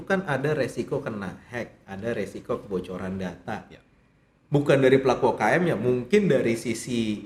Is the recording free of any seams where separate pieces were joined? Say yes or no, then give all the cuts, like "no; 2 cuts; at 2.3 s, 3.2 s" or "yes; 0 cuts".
yes; 0 cuts